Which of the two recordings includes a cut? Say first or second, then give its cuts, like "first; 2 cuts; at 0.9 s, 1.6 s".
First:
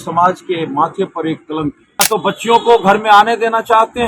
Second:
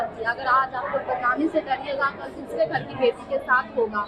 first; 1 cut; at 2.0 s